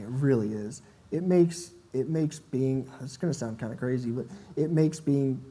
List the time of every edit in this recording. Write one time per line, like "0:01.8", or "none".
none